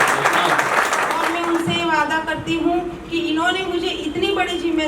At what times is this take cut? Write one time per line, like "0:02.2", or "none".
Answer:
0:01.3